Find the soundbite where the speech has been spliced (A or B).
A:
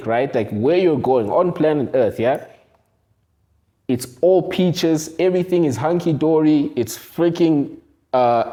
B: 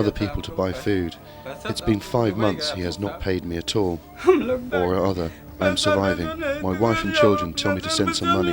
B